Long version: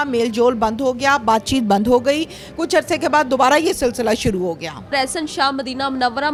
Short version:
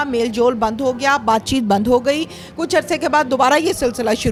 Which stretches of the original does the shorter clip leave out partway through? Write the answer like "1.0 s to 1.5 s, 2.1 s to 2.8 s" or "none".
none